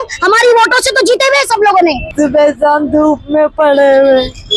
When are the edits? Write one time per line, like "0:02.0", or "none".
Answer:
0:02.1